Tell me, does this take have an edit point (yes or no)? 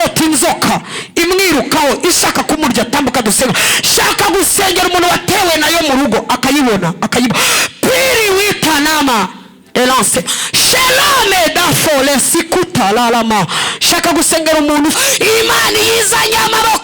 yes